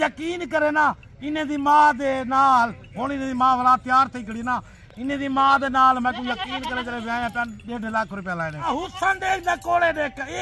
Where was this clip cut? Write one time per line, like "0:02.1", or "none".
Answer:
0:08.7